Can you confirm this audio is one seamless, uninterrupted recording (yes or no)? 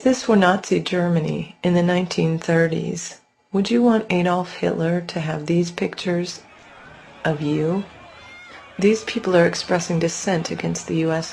no